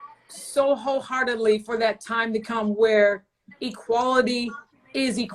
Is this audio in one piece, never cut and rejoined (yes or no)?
yes